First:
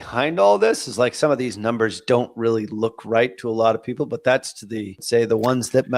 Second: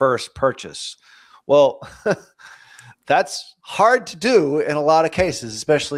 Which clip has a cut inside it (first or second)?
first